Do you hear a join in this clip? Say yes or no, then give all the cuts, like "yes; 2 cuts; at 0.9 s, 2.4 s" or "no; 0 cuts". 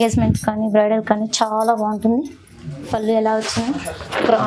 no; 0 cuts